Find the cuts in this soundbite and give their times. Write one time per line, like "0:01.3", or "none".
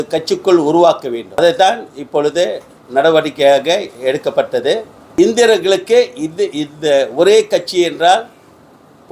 0:01.4
0:05.0